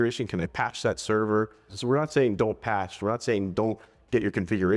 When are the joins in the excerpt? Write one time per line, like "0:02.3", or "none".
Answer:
0:01.7